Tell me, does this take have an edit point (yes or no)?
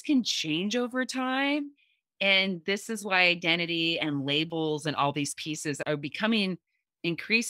yes